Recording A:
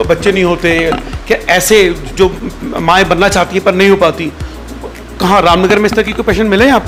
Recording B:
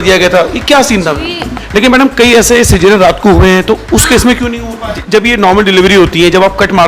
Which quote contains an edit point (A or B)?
B